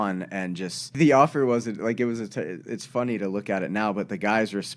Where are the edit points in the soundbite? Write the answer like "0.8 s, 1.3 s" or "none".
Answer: 1.0 s